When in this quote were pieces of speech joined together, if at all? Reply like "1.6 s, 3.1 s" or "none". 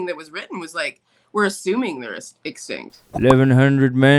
2.9 s